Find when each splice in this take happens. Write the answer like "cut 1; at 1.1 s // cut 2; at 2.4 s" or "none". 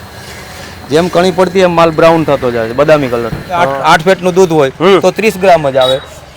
cut 1; at 3.7 s

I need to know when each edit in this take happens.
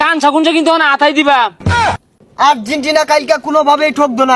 cut 1; at 2.0 s

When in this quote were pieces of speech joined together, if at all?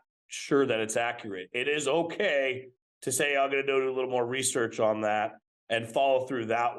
none

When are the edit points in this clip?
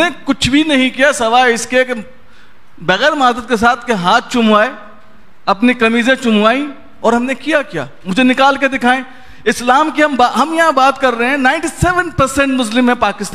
none

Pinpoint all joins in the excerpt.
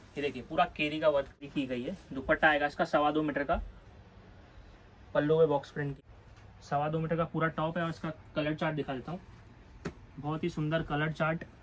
cut 1; at 1.5 s // cut 2; at 5.9 s

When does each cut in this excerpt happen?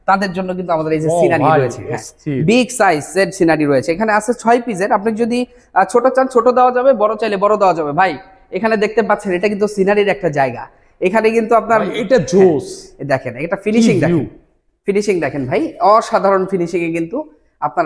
none

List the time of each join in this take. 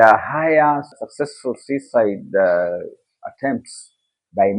cut 1; at 0.9 s

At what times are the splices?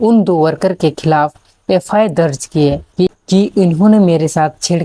cut 1; at 3.1 s

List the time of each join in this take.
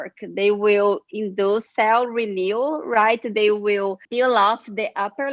cut 1; at 1.7 s

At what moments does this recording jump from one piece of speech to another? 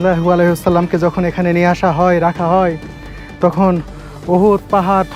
none

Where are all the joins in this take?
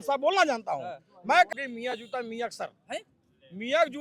cut 1; at 1.5 s

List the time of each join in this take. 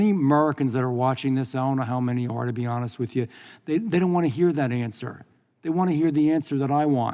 none

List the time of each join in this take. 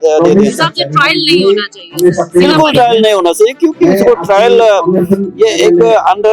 none

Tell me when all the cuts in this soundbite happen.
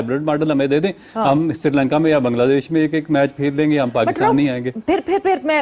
none

